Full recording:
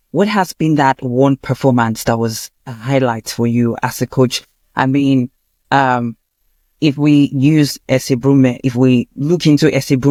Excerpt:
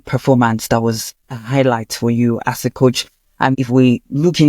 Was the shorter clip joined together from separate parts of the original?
yes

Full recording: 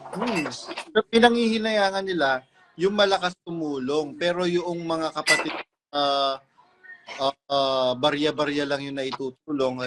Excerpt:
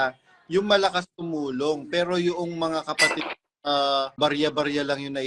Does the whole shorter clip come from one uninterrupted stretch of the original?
no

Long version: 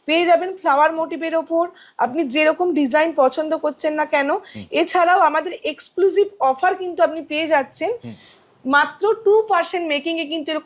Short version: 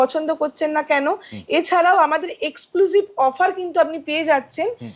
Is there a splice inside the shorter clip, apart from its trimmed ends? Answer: no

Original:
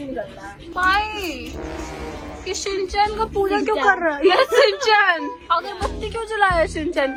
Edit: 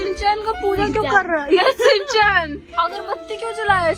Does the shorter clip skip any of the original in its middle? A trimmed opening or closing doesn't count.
no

